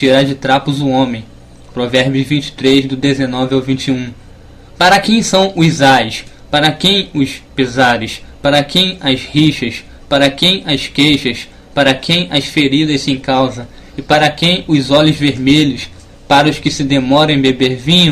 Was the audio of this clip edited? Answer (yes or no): yes